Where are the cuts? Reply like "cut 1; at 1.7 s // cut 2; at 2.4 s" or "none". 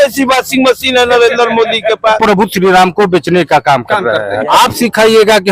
cut 1; at 2.2 s // cut 2; at 4.4 s